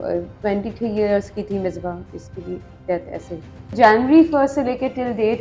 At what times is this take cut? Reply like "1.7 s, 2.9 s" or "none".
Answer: 3.6 s